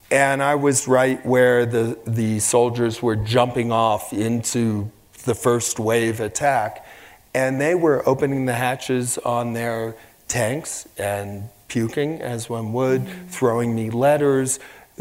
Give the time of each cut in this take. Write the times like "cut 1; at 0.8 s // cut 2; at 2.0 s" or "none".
none